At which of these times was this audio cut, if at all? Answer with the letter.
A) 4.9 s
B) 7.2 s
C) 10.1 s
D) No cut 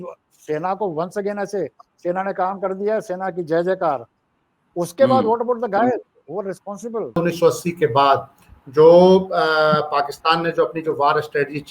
B